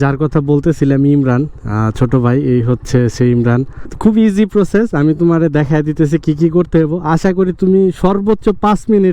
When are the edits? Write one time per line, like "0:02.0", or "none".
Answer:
0:03.8